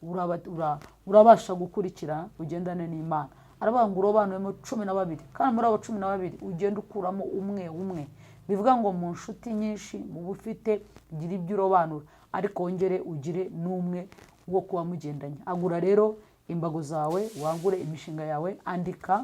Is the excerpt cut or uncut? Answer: uncut